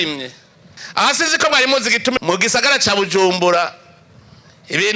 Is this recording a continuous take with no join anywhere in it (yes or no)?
no